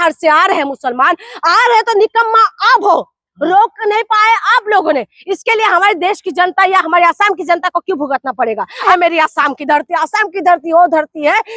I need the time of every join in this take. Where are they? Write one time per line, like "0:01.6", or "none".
0:08.9